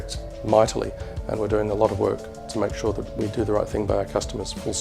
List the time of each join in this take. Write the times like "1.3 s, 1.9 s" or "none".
3.1 s